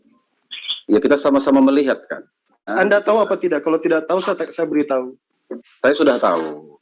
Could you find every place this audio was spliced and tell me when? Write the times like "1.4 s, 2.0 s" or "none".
2.7 s